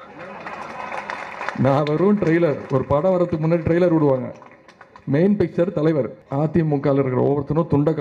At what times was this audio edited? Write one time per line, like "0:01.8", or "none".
0:06.2